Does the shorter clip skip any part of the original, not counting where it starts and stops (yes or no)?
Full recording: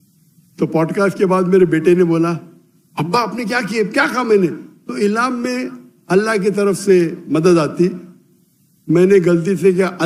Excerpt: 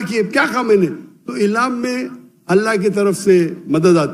no